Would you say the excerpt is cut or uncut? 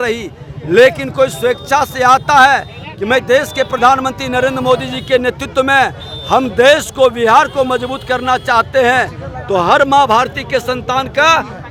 uncut